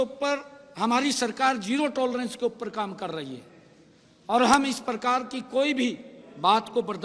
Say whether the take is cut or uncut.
uncut